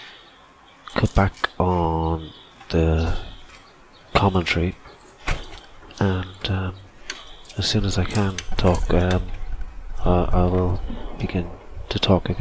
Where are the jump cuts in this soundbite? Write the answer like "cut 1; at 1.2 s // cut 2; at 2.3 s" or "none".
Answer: none